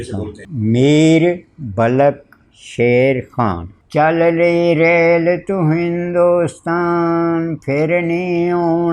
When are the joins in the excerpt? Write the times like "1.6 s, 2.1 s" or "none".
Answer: 3.8 s